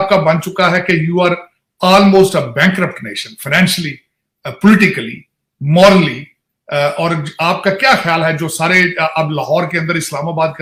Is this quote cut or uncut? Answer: uncut